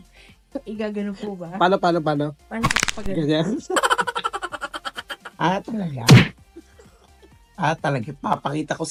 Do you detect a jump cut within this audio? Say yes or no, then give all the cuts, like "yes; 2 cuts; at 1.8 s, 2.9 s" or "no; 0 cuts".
no; 0 cuts